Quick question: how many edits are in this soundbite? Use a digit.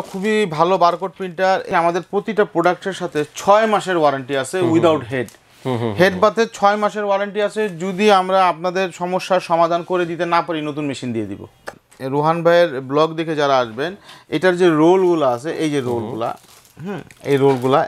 2